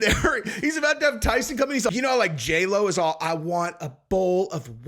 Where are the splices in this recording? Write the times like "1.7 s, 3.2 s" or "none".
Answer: 1.9 s